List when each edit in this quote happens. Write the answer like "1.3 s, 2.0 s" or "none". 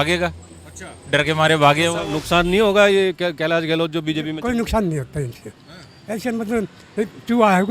2.1 s